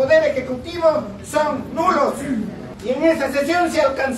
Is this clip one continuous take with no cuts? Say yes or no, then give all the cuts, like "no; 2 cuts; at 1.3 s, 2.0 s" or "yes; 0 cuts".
no; 1 cut; at 2.7 s